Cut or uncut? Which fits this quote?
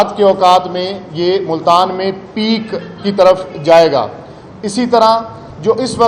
uncut